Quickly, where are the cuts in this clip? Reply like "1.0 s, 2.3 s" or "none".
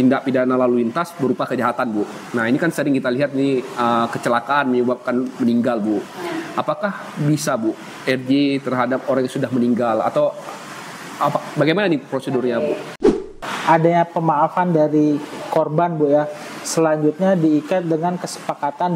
13.3 s